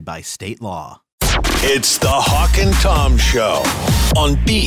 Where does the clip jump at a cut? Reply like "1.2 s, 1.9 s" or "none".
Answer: 1.1 s